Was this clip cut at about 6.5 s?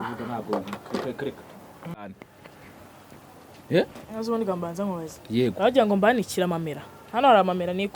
no; 1 cut; at 2.2 s

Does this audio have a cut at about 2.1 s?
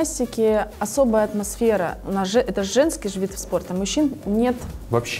no; 0 cuts

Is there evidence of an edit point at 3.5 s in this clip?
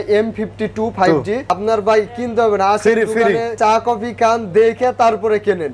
yes; 2 cuts; at 1.5 s, 3.5 s

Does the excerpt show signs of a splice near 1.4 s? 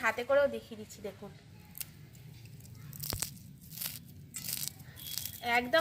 no; 0 cuts

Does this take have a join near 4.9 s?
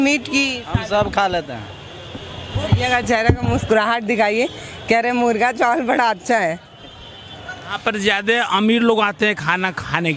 no; 2 cuts; at 2.6 s, 7.7 s

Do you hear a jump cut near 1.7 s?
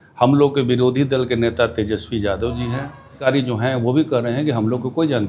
no; 1 cut; at 3.3 s

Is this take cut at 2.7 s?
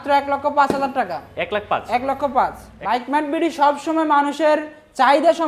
yes; 1 cut; at 2.7 s

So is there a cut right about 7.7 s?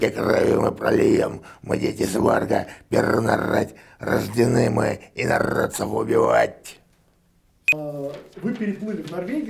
yes; 1 cut; at 7.7 s

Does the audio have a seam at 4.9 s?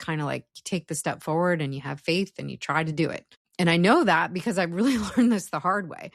no; 0 cuts

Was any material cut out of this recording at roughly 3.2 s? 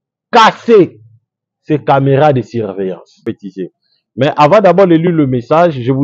yes; 1 cut; at 3.2 s

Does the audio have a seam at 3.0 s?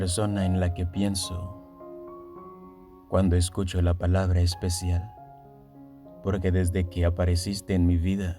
yes; 2 cuts; at 1.4 s, 3.0 s

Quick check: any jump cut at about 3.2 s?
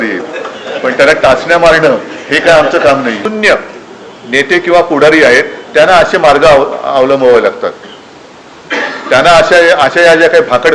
yes; 1 cut; at 3.2 s

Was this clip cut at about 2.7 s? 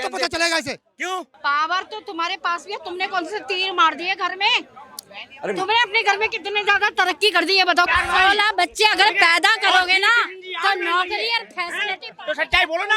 no; 2 cuts; at 1.4 s, 7.9 s

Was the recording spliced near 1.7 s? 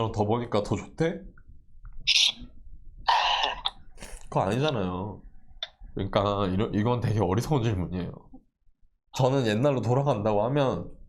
no; 2 cuts; at 5.9 s, 9.1 s

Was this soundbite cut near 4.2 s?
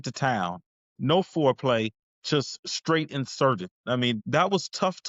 yes; 1 cut; at 4.2 s

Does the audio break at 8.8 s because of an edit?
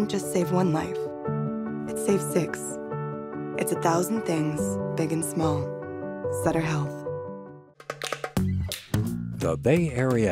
no; 1 cut; at 7.6 s

